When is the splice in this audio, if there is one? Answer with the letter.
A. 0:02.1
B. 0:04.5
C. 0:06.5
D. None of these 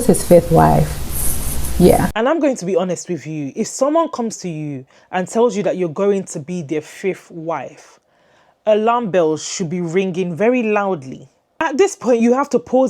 A